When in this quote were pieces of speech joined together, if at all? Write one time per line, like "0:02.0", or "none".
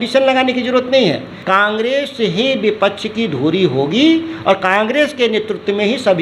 0:01.3